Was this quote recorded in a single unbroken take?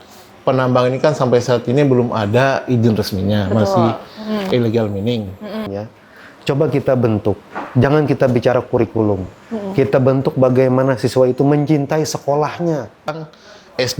no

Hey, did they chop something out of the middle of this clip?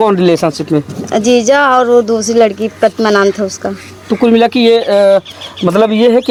no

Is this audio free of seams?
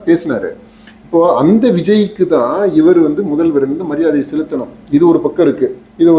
yes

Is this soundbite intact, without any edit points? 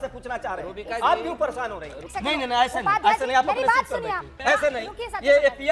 no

